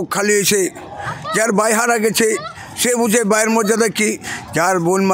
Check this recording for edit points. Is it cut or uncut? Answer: uncut